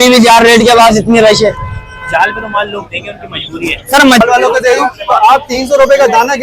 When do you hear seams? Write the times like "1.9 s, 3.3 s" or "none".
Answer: 4.2 s